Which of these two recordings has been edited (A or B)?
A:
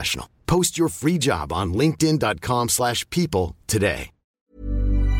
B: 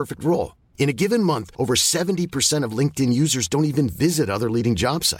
A